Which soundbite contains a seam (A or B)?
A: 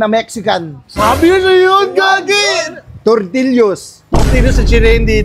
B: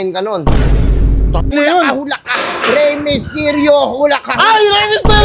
B